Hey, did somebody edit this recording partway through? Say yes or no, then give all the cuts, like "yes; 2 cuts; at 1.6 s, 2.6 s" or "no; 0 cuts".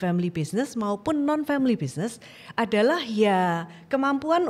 no; 0 cuts